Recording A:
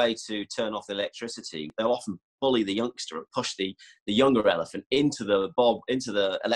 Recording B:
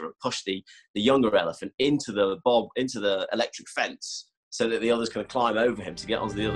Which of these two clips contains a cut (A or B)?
A